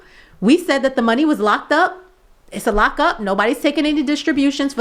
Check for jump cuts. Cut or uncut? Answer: uncut